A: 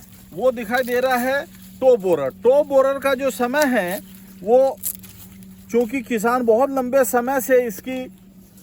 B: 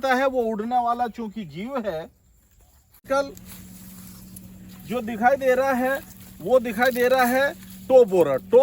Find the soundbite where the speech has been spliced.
B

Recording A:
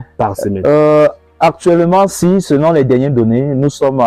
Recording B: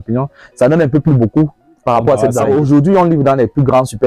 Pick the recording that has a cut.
B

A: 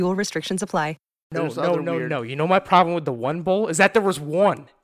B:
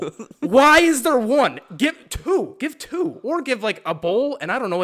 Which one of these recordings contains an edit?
A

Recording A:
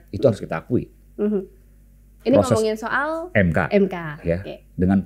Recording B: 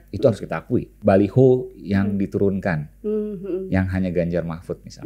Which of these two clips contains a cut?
B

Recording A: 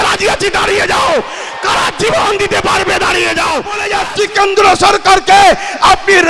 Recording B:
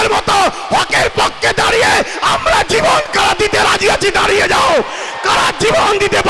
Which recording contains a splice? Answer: A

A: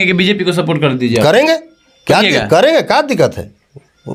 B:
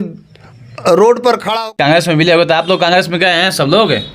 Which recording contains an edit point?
B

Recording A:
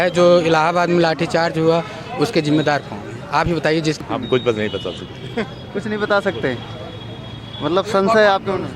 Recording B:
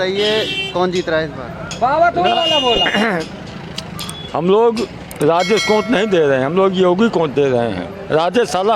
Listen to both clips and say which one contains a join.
A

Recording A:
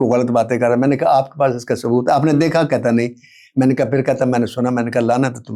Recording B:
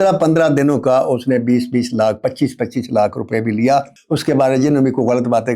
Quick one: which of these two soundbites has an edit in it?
B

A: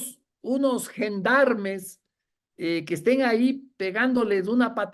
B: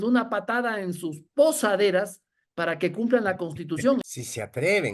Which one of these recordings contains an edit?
B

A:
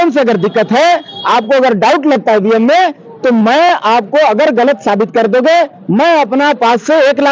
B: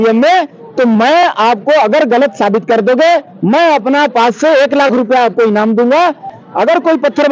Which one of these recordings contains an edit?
B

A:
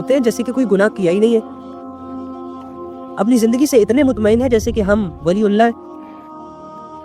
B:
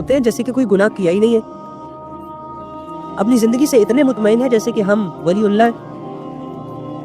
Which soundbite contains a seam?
B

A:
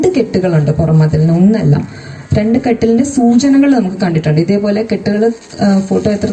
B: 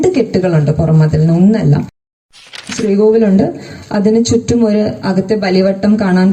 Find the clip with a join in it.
B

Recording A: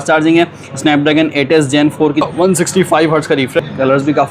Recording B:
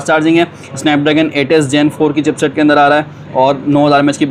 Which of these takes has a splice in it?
A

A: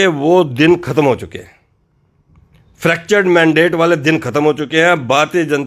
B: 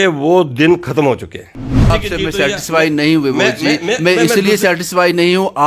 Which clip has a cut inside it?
B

